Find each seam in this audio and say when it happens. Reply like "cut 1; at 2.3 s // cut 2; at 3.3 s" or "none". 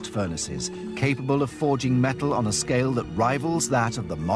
cut 1; at 1.2 s